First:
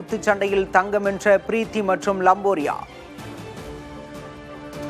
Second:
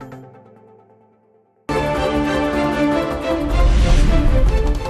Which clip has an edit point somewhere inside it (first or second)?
second